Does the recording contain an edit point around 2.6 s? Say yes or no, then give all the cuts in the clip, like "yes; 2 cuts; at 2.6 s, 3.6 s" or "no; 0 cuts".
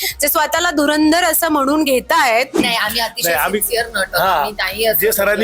yes; 1 cut; at 2.6 s